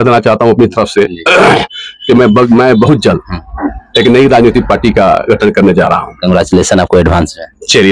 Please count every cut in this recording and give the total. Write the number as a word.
zero